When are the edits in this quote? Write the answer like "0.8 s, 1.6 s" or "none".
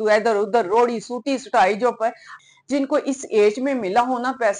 2.3 s